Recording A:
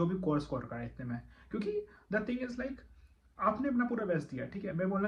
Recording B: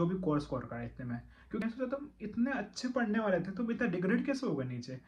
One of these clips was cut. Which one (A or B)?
B